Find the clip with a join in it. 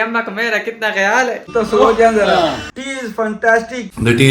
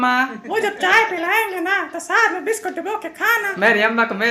first; 2 cuts; at 1.4 s, 2.7 s

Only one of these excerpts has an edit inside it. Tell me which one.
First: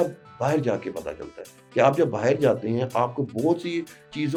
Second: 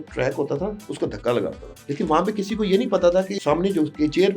second; 2 cuts; at 1.7 s, 3.3 s

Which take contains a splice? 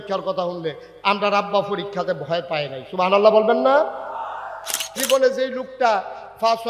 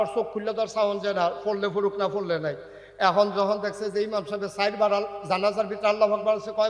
first; 1 cut; at 5.0 s

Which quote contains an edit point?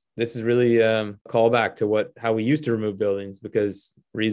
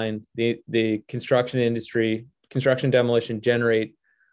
first; 1 cut; at 1.3 s

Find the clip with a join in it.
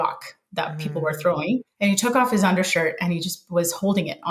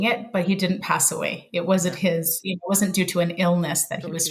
first; 1 cut; at 1.7 s

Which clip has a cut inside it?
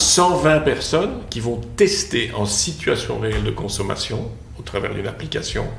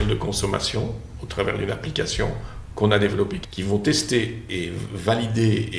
second; 2 cuts; at 3.4 s, 4.5 s

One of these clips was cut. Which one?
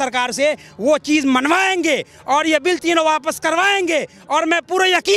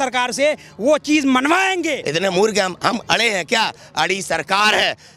second; 1 cut; at 2.0 s

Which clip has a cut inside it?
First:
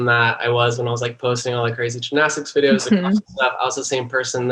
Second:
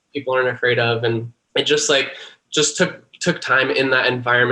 second; 1 cut; at 1.4 s

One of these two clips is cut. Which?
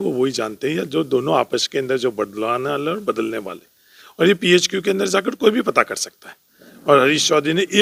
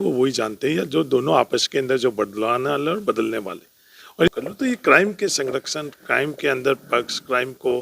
second; 1 cut; at 4.3 s

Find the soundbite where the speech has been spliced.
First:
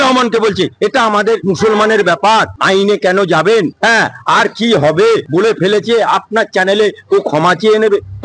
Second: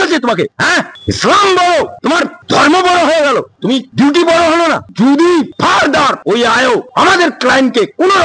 first; 2 cuts; at 1.4 s, 5.3 s

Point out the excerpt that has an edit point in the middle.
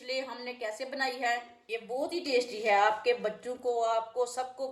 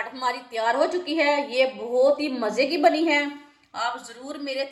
first; 1 cut; at 1.5 s

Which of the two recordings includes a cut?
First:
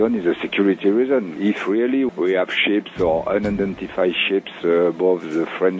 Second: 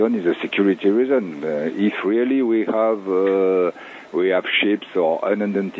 first; 1 cut; at 1.7 s

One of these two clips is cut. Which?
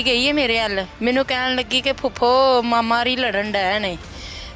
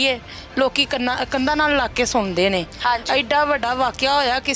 first; 1 cut; at 0.9 s

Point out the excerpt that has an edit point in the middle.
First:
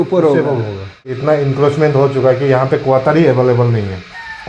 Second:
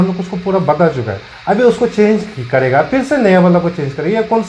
first; 1 cut; at 1.1 s

